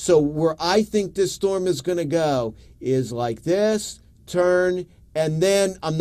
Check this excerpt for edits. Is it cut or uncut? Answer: uncut